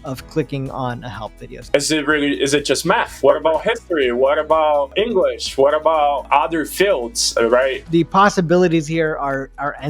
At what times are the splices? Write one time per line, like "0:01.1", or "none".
0:01.5
0:03.1
0:04.9
0:06.2
0:07.8